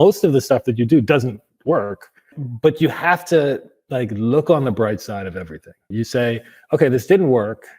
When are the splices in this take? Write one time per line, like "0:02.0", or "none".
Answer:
0:02.4
0:05.9

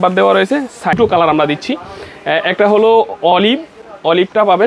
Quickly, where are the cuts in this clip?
0:00.9

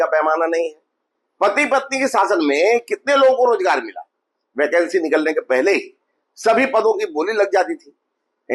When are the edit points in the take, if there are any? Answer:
none

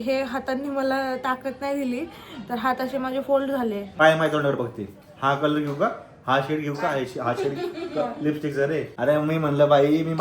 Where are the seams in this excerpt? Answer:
0:04.0
0:08.9

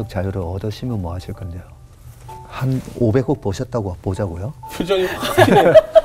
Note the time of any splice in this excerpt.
0:04.5

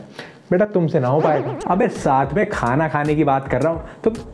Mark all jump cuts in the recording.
0:01.5

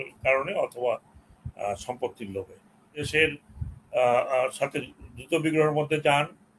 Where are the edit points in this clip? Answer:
0:03.0

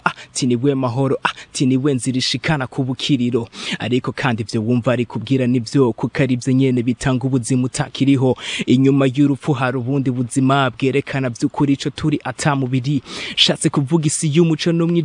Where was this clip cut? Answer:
none

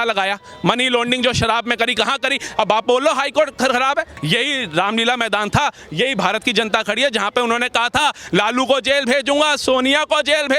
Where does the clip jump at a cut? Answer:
0:04.2

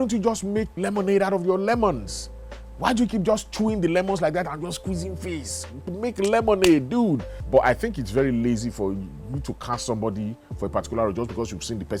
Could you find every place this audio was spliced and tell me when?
0:07.3

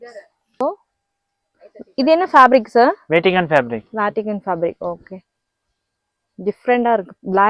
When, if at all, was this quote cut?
none

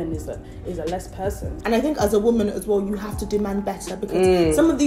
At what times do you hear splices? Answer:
0:01.5

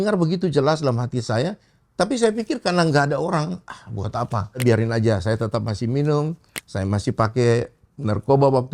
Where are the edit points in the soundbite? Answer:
0:04.6

